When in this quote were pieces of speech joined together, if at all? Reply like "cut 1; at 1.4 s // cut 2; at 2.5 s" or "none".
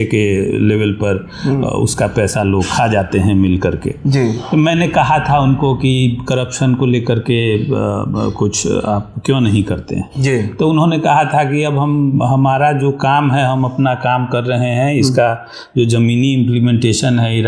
none